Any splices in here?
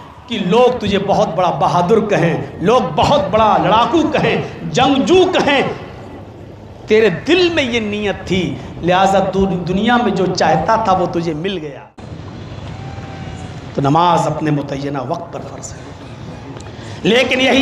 yes; 1 cut; at 11.7 s

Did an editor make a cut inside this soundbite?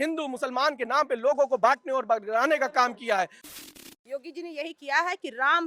yes; 1 cut; at 3.4 s

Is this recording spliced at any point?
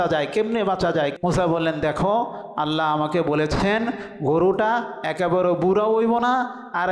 yes; 1 cut; at 1.1 s

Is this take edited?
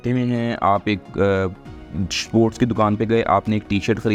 no; 0 cuts

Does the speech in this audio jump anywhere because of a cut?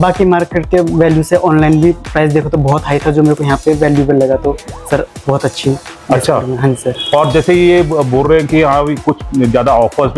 no; 0 cuts

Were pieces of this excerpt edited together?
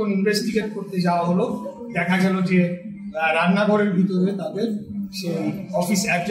no; 0 cuts

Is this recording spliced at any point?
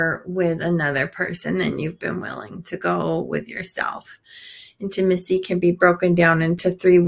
no; 0 cuts

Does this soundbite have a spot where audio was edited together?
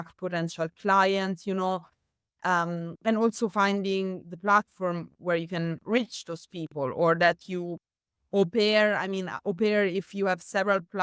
no; 0 cuts

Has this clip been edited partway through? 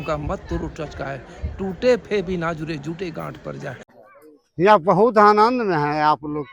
yes; 1 cut; at 3.9 s

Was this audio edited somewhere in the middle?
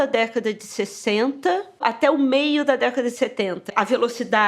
yes; 2 cuts; at 1.8 s, 3.6 s

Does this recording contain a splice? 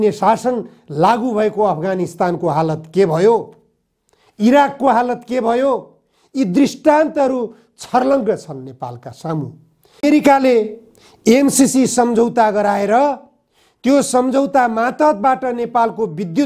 yes; 1 cut; at 10.0 s

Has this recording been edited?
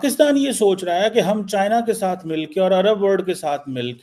no; 0 cuts

